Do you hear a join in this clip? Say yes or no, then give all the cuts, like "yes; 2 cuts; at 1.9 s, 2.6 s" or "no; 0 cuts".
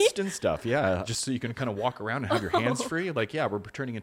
yes; 1 cut; at 1.0 s